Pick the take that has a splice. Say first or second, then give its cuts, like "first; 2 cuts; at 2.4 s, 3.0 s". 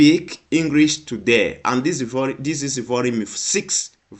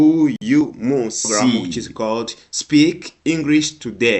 second; 1 cut; at 1.8 s